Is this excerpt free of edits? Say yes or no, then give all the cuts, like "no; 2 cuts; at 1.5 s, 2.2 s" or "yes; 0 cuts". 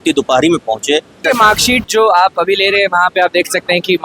no; 1 cut; at 1.2 s